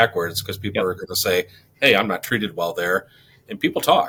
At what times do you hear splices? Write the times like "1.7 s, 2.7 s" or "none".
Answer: none